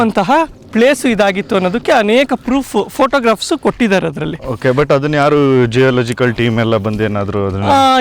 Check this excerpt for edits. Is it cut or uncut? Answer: uncut